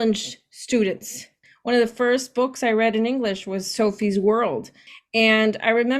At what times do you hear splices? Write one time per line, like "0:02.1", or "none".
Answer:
0:01.5
0:04.8